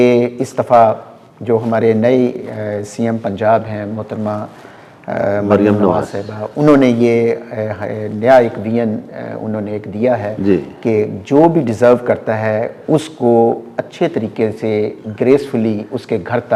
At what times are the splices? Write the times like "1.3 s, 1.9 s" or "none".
none